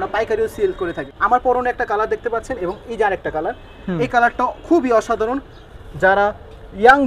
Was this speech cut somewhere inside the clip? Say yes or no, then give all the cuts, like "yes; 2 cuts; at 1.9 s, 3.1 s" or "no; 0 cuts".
yes; 1 cut; at 1.1 s